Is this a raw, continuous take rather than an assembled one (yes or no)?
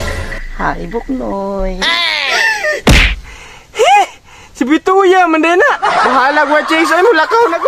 yes